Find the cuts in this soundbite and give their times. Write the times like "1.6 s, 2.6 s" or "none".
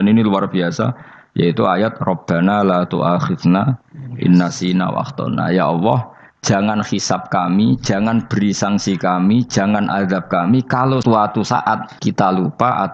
11.0 s, 11.9 s